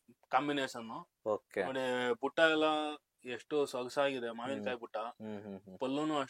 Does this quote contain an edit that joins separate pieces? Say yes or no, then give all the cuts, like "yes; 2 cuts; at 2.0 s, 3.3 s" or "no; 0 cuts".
no; 0 cuts